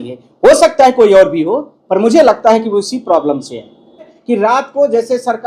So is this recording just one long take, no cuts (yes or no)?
no